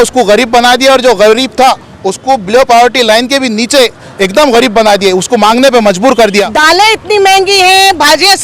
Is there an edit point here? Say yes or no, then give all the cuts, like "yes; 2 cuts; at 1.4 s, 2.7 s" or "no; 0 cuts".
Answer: yes; 1 cut; at 6.5 s